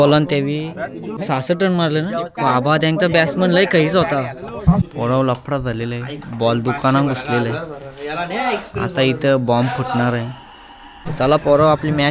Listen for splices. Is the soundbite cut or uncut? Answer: cut